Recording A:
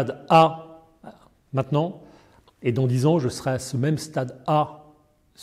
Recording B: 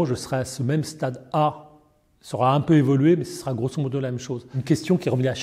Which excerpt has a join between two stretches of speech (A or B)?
B